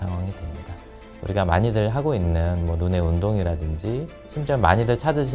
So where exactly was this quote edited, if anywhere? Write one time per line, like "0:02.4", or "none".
0:01.1